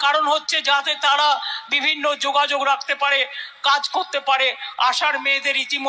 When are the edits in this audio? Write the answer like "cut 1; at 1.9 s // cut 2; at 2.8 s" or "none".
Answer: none

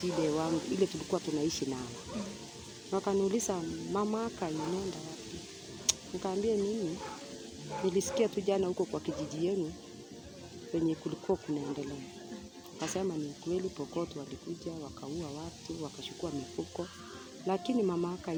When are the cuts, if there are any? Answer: none

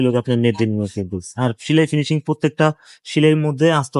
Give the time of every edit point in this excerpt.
none

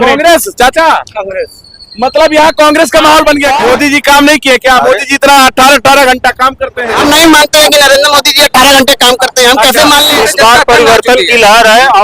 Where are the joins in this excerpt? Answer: cut 1; at 3.6 s // cut 2; at 6.9 s // cut 3; at 10.2 s

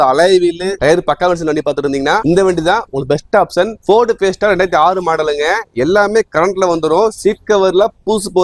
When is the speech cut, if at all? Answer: none

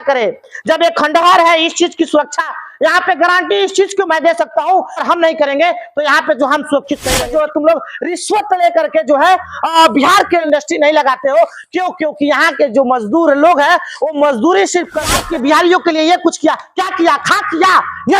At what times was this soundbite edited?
cut 1; at 5.0 s // cut 2; at 7.2 s // cut 3; at 10.4 s // cut 4; at 15.2 s

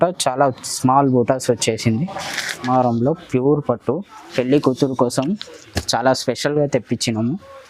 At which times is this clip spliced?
cut 1; at 2.7 s

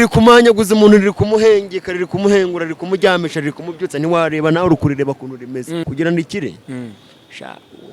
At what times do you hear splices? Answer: cut 1; at 5.8 s

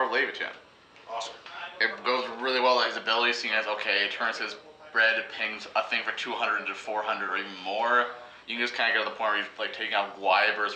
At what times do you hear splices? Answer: none

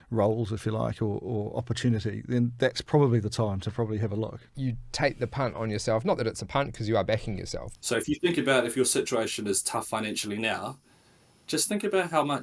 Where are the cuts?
cut 1; at 4.4 s // cut 2; at 7.6 s

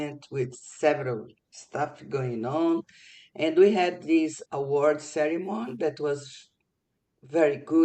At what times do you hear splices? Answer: cut 1; at 4.4 s

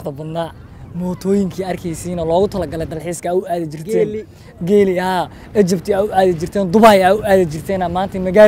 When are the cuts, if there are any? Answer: none

